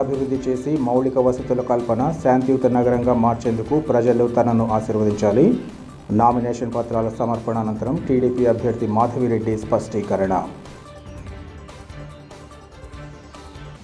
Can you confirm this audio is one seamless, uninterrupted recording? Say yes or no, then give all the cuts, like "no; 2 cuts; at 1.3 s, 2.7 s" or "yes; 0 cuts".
yes; 0 cuts